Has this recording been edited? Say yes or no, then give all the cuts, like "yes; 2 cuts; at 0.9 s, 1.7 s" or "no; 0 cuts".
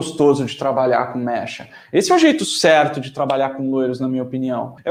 no; 0 cuts